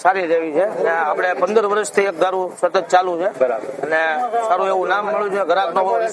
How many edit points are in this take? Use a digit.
0